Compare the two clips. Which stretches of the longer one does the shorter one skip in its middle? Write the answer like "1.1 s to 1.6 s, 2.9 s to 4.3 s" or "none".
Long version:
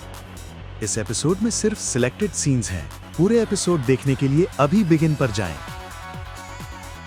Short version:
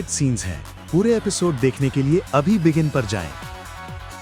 none